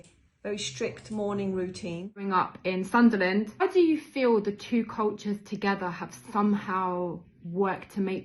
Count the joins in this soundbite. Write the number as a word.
two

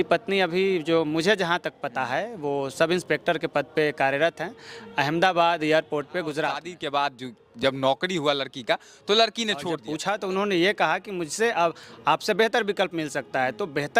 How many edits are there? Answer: two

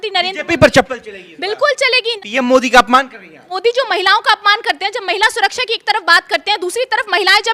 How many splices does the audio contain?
two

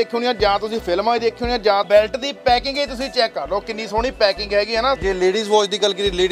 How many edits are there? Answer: two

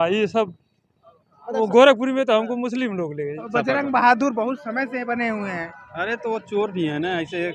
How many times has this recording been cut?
one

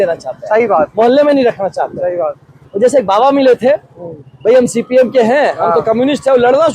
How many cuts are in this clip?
one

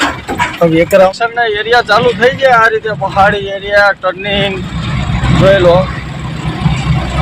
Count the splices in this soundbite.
one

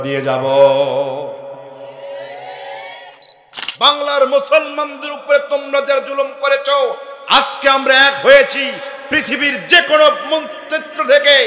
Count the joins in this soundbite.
one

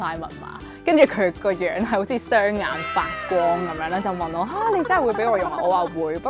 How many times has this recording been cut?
zero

